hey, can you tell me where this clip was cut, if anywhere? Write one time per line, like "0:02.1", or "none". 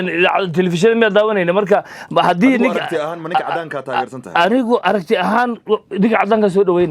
none

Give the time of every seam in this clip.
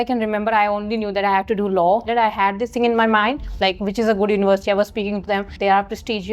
0:02.0
0:03.5
0:05.5

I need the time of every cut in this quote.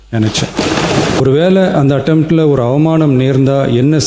0:01.2

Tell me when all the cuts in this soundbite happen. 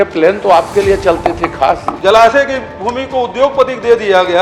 0:01.9

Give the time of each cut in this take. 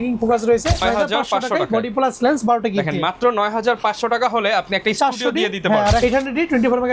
0:00.8
0:06.0

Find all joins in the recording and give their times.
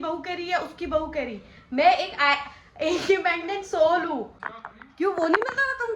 0:04.4

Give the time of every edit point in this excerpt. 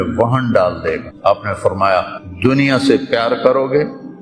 0:01.1
0:02.2

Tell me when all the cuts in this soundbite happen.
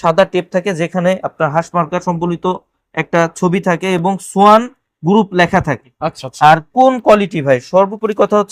none

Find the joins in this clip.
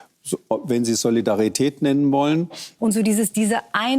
0:02.6

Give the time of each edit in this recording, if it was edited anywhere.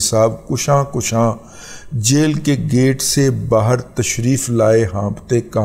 none

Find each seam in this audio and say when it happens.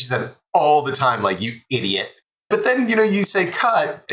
0:02.5

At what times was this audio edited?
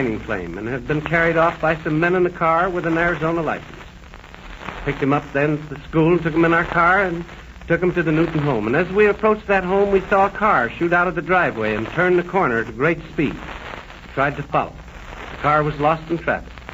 none

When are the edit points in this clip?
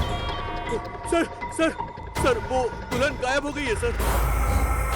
0:04.0

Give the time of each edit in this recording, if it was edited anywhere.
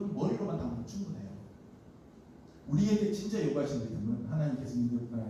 none

